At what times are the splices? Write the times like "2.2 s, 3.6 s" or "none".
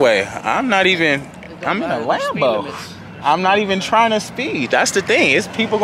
none